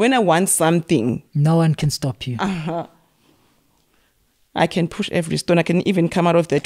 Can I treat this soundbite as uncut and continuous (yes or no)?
yes